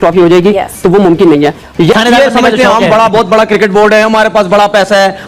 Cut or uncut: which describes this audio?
cut